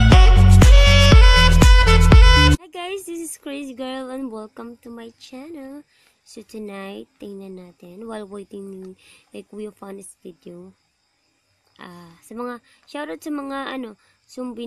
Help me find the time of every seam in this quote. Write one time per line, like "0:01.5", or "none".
0:02.7

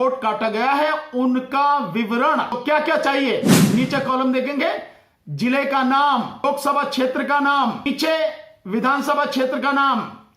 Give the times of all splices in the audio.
0:02.6
0:06.4
0:07.9

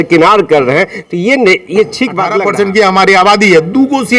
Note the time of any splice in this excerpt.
0:02.3

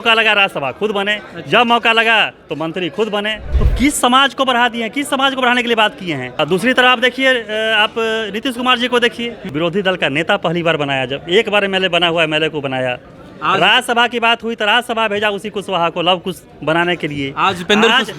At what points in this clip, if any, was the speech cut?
0:03.5
0:06.3
0:09.4

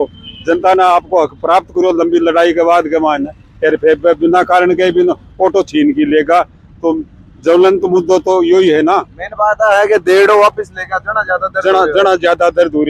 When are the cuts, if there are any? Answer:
none

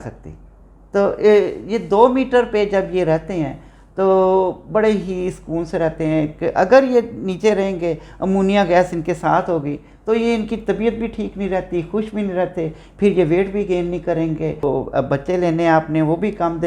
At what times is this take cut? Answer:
0:14.6

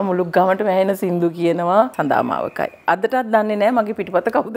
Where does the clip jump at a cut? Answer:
0:01.9

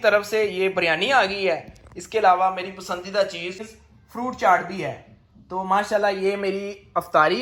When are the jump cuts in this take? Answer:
none

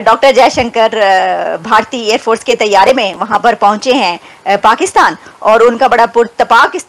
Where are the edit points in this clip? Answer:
none

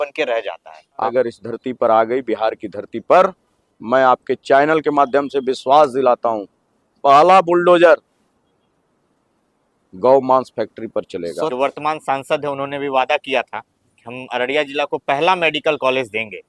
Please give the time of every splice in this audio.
0:01.1
0:11.5

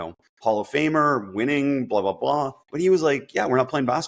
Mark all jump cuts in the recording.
0:02.6

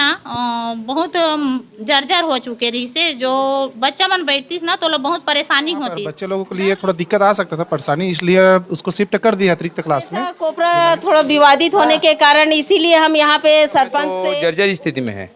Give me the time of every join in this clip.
0:06.2
0:10.4
0:14.1

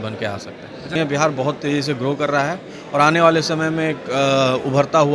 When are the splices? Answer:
0:00.9

